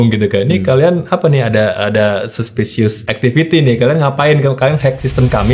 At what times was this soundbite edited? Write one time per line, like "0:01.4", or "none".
0:03.1